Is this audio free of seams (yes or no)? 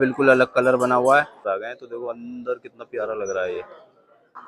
no